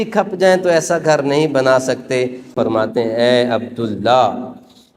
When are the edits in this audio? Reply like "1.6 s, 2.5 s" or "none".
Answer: 2.5 s